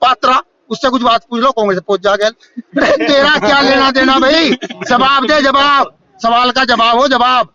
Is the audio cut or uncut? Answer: uncut